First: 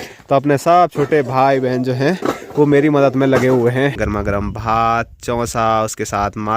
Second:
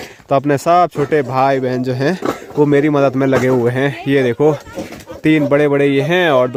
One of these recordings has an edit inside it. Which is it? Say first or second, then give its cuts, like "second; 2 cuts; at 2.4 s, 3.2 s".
first; 1 cut; at 4.0 s